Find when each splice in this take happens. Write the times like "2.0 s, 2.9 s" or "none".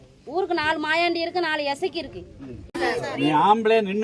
2.6 s